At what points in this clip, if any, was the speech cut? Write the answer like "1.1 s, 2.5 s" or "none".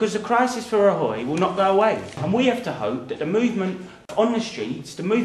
2.2 s, 4.1 s